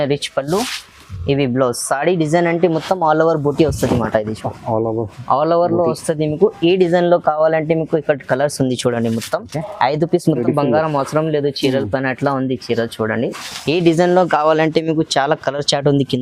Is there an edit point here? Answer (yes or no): yes